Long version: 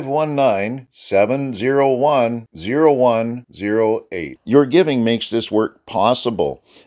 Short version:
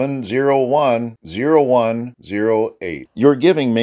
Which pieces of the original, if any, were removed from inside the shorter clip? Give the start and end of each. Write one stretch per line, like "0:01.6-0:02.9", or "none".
none